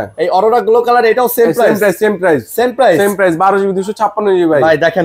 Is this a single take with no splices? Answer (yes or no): yes